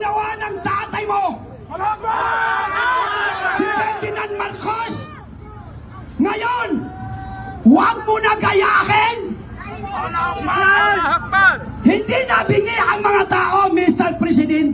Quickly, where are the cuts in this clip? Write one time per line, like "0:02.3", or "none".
0:11.8